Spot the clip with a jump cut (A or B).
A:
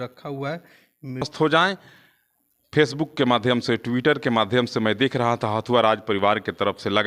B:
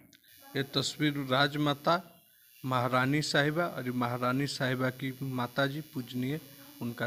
A